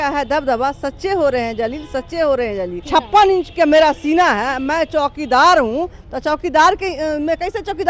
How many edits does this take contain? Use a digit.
1